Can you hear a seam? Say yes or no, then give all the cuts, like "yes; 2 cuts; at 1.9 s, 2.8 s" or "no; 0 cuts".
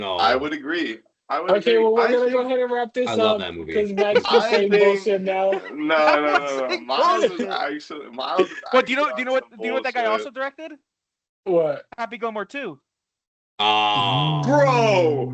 no; 0 cuts